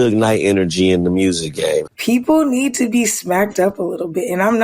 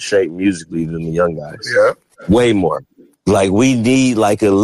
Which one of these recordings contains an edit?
first; 1 cut; at 1.9 s

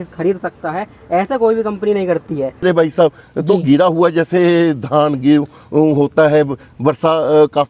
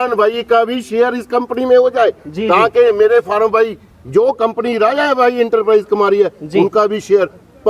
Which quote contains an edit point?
first; 1 cut; at 2.6 s

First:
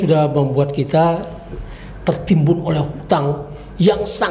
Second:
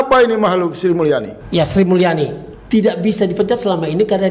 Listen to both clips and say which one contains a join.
second; 2 cuts; at 1.4 s, 2.5 s

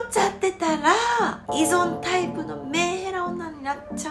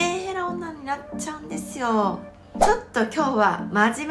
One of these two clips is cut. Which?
second; 1 cut; at 2.7 s

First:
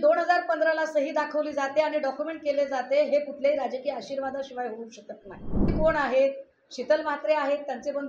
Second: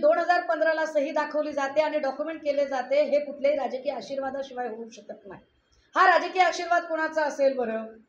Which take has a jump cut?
first; 1 cut; at 5.7 s

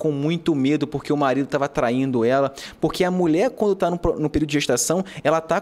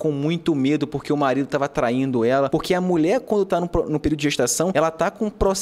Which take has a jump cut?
second; 2 cuts; at 2.5 s, 4.7 s

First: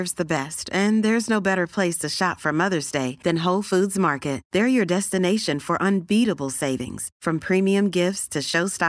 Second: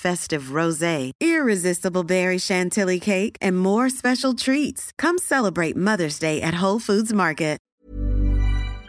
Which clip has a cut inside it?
second; 1 cut; at 7.6 s

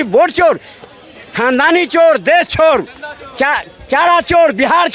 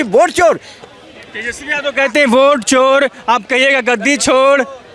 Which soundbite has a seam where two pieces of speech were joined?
first; 1 cut; at 1.2 s

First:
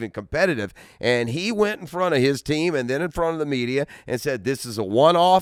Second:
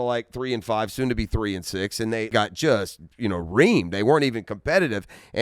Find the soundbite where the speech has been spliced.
second; 1 cut; at 2.3 s

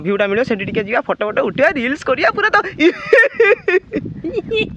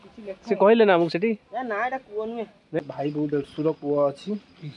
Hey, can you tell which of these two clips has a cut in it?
second; 1 cut; at 2.8 s

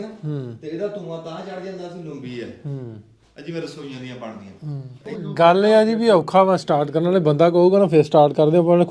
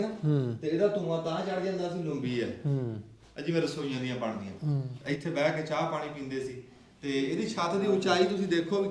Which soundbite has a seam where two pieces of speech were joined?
first; 1 cut; at 4.9 s

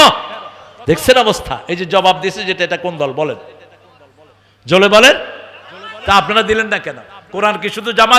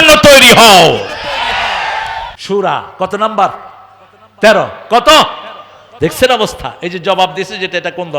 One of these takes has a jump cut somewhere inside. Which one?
second; 1 cut; at 2.3 s

